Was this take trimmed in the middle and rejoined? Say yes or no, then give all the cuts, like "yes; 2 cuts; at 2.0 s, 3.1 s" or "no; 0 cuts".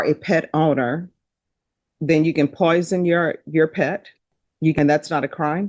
yes; 1 cut; at 4.7 s